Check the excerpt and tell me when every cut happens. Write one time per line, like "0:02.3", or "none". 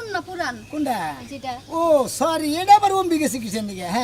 none

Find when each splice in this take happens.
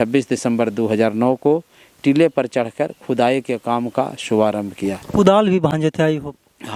none

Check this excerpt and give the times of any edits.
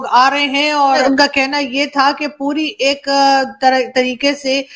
0:01.0

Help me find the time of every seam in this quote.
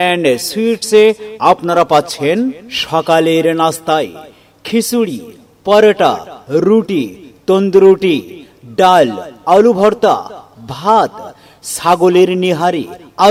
none

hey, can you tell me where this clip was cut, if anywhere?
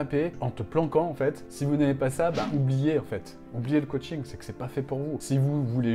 0:01.5

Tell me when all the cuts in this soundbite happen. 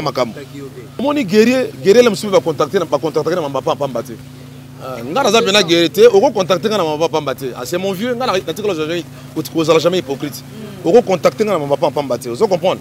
0:01.0

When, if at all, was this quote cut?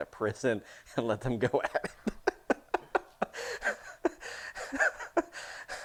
none

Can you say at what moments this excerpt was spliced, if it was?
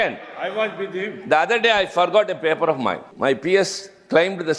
0:03.1

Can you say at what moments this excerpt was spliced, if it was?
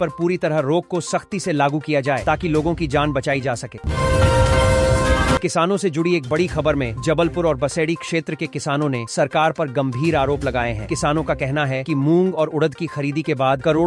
0:03.8
0:05.4

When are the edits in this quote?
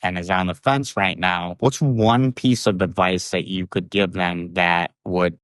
0:01.5

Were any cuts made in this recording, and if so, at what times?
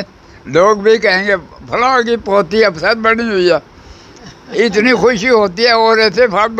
none

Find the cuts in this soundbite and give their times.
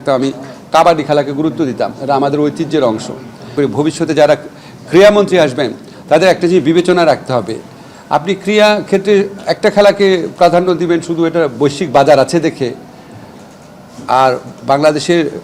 0:03.5

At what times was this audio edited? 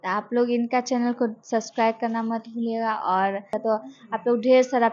0:03.5

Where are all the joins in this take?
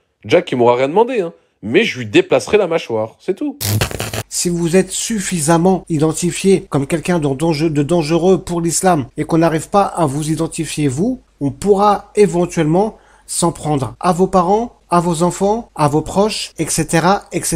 0:03.9
0:05.8
0:06.7
0:09.1
0:11.3
0:13.9
0:14.8
0:15.7
0:16.5

